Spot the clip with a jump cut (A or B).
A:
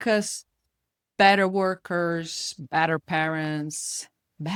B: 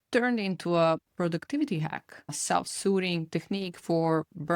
B